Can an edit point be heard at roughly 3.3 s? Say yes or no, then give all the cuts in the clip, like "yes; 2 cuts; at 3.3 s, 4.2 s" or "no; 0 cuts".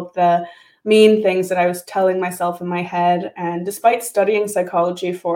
no; 0 cuts